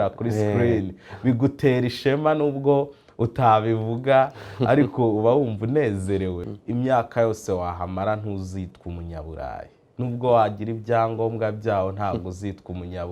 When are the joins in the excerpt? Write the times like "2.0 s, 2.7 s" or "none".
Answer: 6.4 s